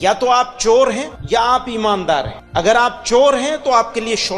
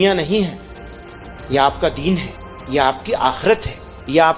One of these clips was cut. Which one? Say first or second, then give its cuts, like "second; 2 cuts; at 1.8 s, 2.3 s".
first; 2 cuts; at 1.1 s, 2.4 s